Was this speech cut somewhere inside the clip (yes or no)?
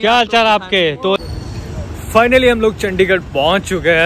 yes